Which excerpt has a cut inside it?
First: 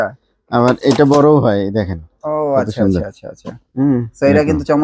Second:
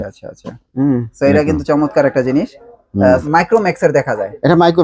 second; 1 cut; at 3.2 s

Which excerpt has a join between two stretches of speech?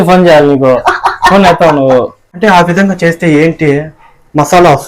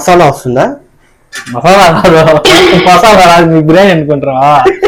first; 1 cut; at 2.2 s

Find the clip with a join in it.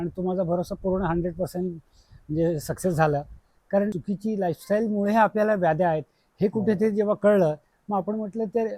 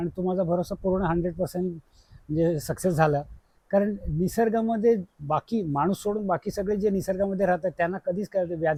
first; 1 cut; at 4.0 s

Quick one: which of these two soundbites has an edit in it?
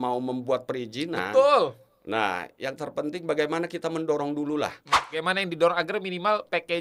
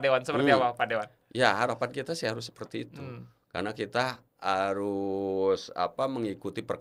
first; 1 cut; at 5.2 s

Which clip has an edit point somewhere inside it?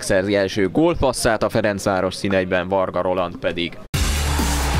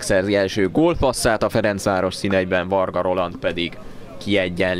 second; 1 cut; at 3.9 s

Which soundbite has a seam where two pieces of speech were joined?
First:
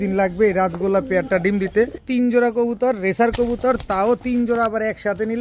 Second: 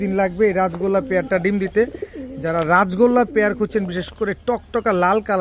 first; 1 cut; at 2.0 s

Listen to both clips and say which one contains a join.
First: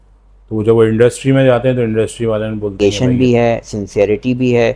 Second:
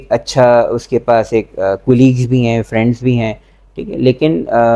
first; 1 cut; at 2.7 s

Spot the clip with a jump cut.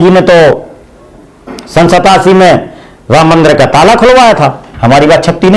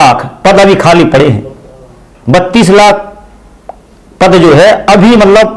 first; 1 cut; at 4.7 s

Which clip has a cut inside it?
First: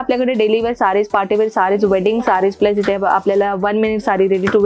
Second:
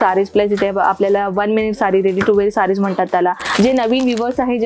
second; 1 cut; at 3.4 s

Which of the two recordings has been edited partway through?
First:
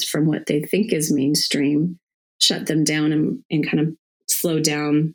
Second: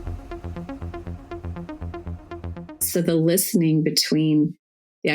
second; 1 cut; at 2.7 s

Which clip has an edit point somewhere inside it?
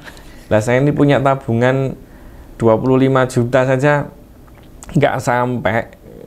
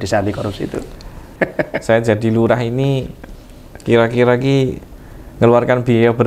second; 1 cut; at 1.3 s

